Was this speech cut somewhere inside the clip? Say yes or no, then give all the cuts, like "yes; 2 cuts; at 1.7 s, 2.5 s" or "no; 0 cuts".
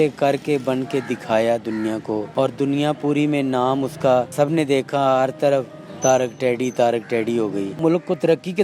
yes; 3 cuts; at 2.3 s, 4.3 s, 7.7 s